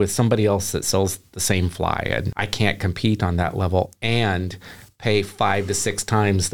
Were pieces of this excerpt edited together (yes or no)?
yes